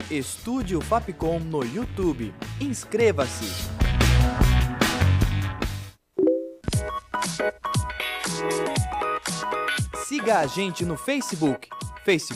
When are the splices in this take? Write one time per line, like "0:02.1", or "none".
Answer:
0:09.5